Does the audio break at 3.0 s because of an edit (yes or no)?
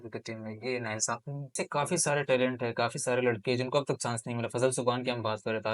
no